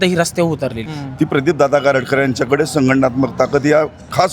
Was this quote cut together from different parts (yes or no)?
yes